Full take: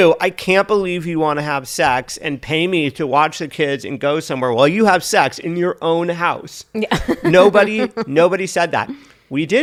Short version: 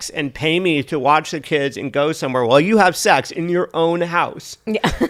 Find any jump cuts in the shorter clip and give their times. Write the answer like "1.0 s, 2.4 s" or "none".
none